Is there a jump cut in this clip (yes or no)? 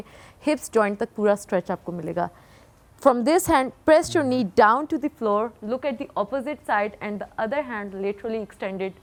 no